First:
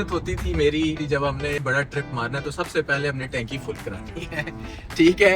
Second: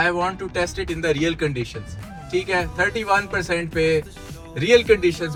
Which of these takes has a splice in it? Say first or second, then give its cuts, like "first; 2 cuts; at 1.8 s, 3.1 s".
first; 1 cut; at 1.0 s